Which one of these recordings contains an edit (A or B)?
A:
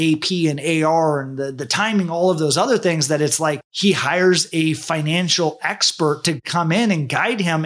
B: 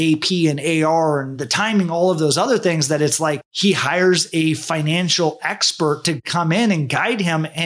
B